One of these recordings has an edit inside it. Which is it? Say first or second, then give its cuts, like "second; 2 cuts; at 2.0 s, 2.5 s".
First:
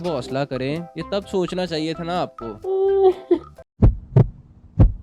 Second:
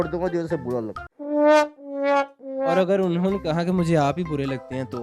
first; 2 cuts; at 0.9 s, 2.5 s